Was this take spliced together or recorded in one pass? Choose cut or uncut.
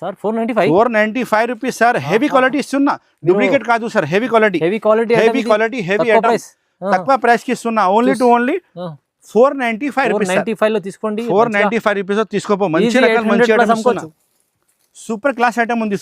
uncut